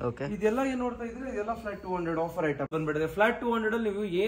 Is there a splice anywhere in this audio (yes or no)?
yes